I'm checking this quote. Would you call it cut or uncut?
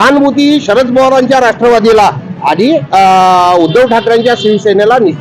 uncut